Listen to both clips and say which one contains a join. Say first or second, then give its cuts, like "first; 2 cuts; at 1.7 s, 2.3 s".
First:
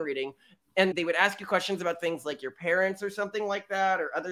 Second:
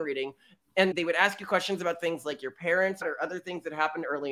second; 1 cut; at 3.0 s